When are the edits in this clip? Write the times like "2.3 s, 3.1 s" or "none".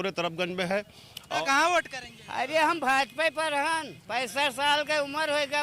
1.4 s